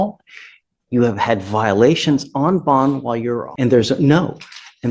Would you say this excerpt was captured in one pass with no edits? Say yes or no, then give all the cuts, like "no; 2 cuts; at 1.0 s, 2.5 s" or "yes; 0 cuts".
no; 1 cut; at 3.5 s